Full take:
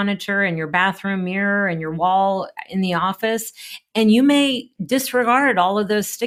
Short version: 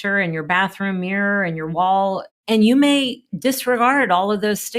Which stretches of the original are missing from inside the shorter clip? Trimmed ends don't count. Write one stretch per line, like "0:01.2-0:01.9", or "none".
0:02.5-0:03.8